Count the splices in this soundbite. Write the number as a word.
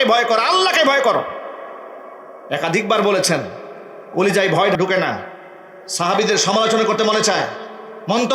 one